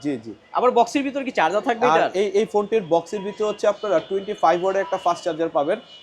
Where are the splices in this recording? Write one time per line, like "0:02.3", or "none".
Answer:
none